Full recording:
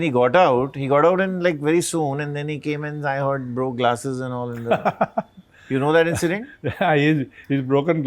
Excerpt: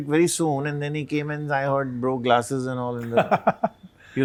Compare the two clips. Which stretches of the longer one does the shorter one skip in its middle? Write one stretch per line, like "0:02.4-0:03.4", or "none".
none